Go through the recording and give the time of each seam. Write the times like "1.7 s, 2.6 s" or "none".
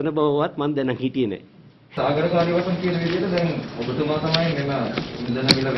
1.8 s